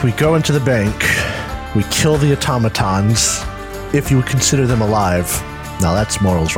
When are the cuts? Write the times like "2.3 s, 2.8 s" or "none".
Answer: none